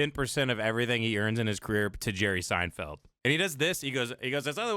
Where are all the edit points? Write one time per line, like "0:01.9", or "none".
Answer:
0:03.0